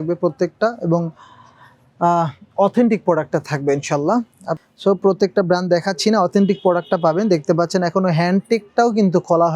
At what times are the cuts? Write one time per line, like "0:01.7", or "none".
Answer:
0:04.5